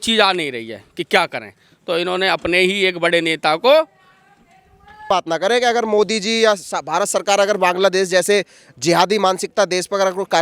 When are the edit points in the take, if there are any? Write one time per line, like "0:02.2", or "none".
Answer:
0:05.1